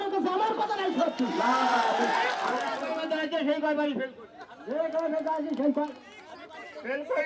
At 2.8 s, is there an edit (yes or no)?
yes